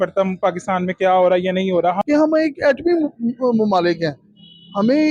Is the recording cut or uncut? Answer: cut